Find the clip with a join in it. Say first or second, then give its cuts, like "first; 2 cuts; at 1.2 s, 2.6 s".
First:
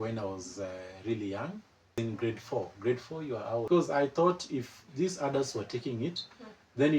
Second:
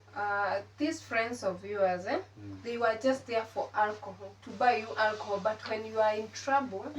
first; 2 cuts; at 1.9 s, 3.6 s